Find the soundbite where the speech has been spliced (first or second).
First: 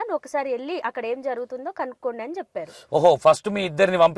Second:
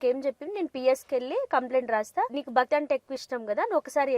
second